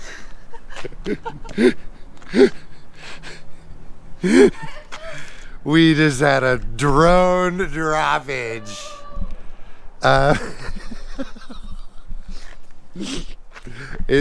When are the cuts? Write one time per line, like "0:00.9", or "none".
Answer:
none

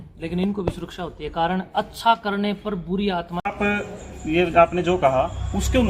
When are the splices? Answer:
0:03.5

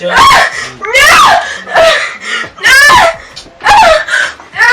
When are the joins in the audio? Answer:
0:01.7

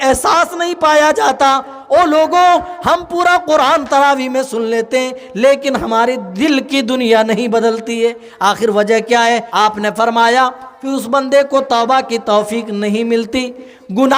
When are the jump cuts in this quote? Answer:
0:09.5

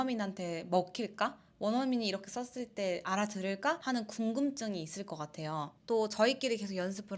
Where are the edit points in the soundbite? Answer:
none

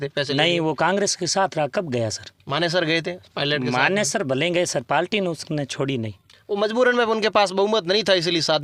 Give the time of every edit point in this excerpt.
none

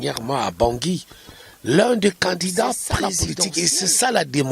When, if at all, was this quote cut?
0:03.2

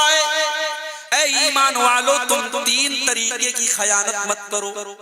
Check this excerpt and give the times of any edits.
0:01.0

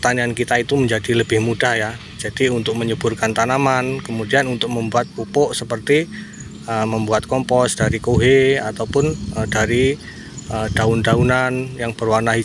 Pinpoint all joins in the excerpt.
none

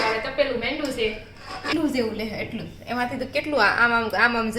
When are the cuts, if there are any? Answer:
0:01.7

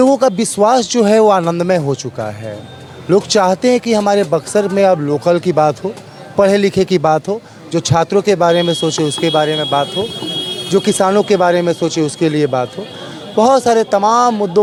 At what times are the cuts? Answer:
none

